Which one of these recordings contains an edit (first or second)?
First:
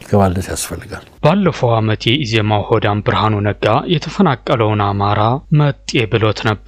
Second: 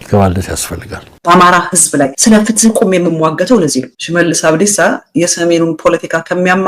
second